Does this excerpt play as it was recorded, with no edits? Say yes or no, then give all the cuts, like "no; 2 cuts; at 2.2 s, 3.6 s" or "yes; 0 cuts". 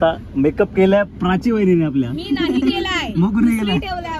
yes; 0 cuts